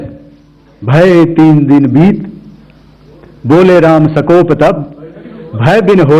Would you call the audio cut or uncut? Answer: uncut